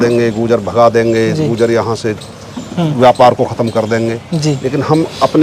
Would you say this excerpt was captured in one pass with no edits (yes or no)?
yes